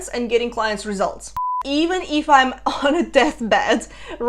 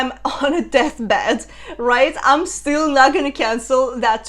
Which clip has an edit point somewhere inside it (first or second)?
first